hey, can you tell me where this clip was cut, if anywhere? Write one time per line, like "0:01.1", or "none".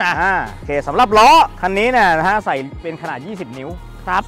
none